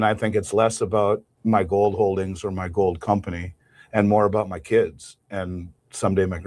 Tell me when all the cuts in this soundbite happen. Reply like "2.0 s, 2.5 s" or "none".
1.3 s